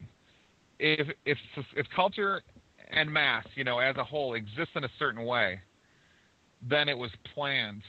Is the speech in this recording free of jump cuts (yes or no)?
no